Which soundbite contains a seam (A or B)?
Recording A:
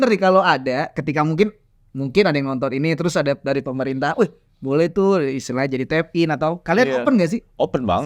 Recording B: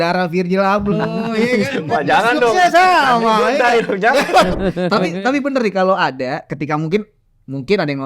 B